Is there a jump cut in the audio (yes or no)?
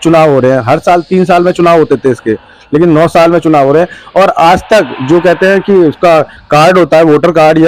no